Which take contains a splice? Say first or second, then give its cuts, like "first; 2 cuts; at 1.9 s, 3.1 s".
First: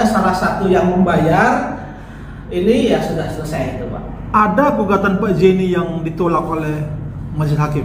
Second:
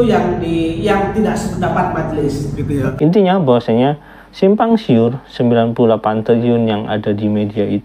second; 1 cut; at 2.9 s